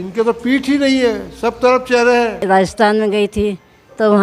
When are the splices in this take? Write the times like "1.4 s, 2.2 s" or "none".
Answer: 2.4 s